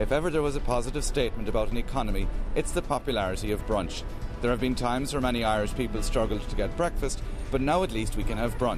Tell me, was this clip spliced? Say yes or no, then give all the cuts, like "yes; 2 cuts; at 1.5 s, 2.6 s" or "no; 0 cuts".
no; 0 cuts